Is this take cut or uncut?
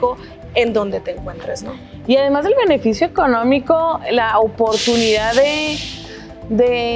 uncut